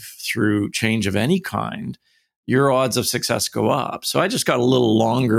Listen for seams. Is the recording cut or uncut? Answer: uncut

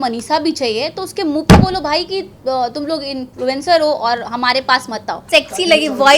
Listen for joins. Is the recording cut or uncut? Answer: cut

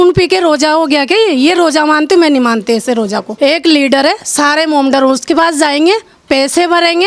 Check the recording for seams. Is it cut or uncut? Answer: cut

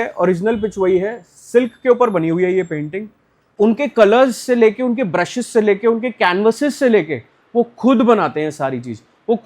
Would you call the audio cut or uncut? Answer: cut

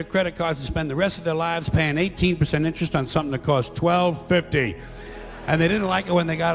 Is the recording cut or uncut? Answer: uncut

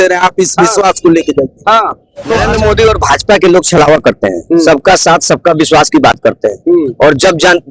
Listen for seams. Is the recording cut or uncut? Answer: cut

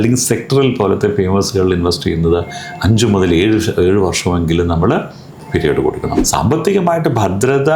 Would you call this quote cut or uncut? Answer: cut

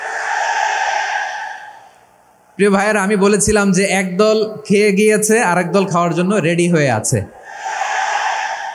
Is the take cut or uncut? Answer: uncut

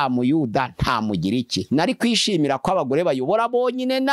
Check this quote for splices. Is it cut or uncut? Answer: cut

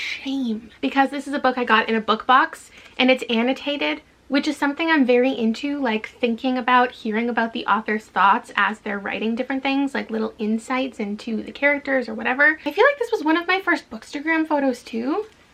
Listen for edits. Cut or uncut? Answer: uncut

